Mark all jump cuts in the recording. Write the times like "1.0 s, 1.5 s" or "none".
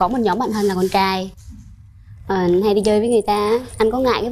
none